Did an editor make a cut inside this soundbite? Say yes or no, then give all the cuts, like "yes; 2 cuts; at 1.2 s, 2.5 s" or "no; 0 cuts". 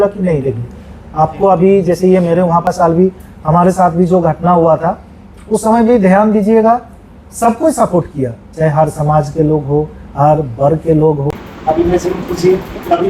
yes; 2 cuts; at 2.7 s, 11.2 s